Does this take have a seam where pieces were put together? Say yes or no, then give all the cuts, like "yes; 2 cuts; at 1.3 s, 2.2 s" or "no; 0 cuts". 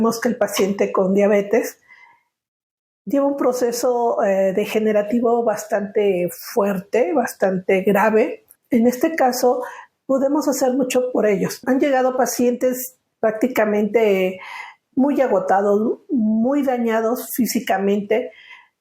yes; 2 cuts; at 8.5 s, 11.6 s